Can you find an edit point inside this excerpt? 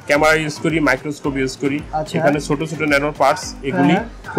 no; 0 cuts

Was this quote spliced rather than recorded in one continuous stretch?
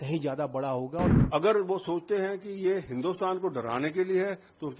yes; 1 cut; at 1.2 s

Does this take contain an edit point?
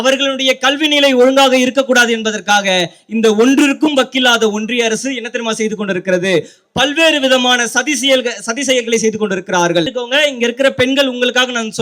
yes; 1 cut; at 9.9 s

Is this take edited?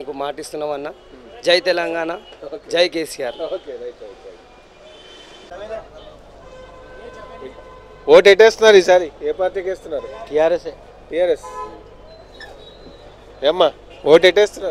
yes; 1 cut; at 5.5 s

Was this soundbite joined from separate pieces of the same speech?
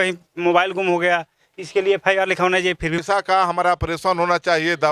yes; 1 cut; at 3.0 s

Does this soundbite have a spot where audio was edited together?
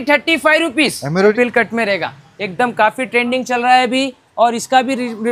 yes; 1 cut; at 1.3 s

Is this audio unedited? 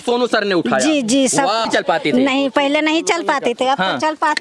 no; 1 cut; at 1.7 s

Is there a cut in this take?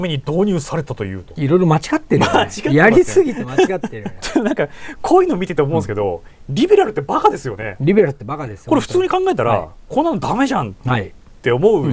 yes; 1 cut; at 4.1 s

